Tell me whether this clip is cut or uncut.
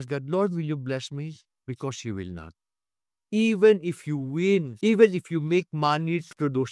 cut